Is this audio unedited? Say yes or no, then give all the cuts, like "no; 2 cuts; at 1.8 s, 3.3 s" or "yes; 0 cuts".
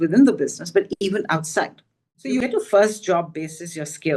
no; 1 cut; at 2.2 s